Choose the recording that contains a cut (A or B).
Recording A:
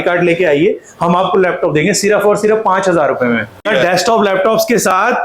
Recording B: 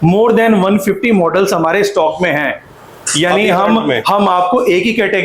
A